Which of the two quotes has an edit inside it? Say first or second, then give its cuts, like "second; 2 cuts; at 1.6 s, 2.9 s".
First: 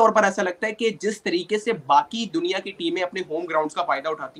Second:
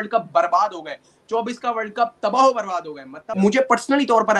second; 1 cut; at 3.2 s